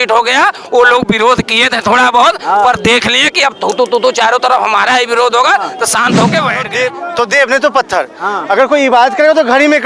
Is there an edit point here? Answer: yes; 1 cut; at 6.7 s

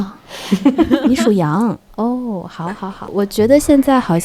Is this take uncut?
no; 1 cut; at 3.1 s

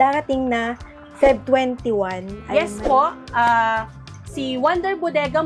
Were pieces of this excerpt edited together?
no; 0 cuts

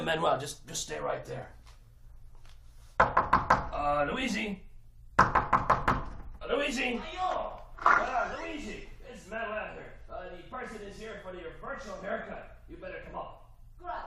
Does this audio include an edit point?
no; 0 cuts

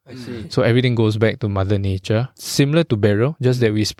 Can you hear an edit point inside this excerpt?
yes; 1 cut; at 2.4 s

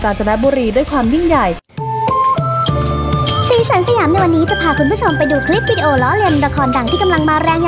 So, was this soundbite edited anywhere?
yes; 1 cut; at 1.6 s

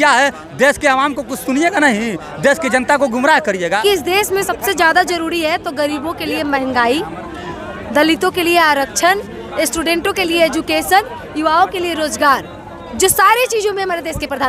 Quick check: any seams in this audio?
yes; 1 cut; at 3.8 s

